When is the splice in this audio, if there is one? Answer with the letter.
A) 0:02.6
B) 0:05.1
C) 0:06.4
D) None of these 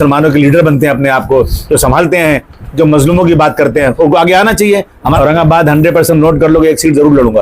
B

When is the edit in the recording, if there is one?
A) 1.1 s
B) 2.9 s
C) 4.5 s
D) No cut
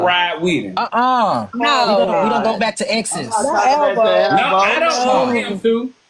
A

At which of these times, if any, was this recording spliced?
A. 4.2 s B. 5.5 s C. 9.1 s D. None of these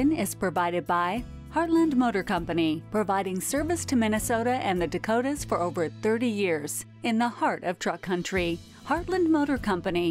D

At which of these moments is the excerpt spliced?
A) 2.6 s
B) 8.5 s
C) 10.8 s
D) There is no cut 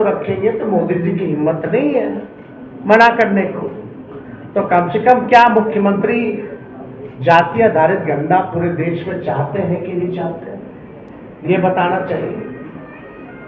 D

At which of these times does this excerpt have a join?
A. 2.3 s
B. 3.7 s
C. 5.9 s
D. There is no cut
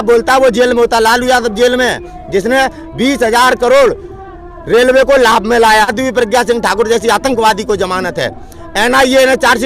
C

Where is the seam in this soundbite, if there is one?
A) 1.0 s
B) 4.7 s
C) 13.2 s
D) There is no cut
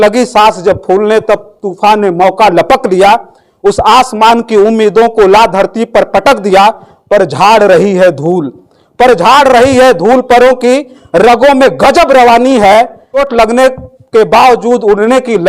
C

